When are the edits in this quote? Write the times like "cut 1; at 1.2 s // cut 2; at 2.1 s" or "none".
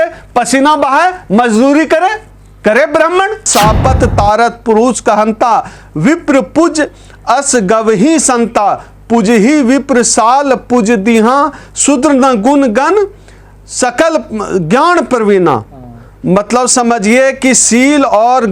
cut 1; at 3.5 s